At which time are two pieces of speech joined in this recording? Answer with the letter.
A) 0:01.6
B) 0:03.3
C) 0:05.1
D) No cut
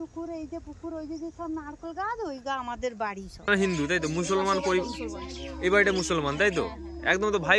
B